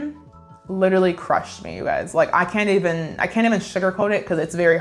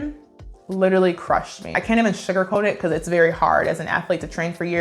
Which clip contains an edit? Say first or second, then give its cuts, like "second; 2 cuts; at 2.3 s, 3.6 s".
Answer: second; 1 cut; at 1.7 s